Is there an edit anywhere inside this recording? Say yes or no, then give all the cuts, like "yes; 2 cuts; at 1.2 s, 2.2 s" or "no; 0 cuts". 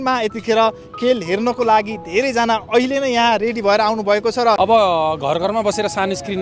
yes; 1 cut; at 4.6 s